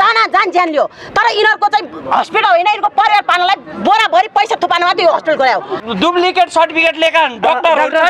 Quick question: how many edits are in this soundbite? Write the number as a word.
one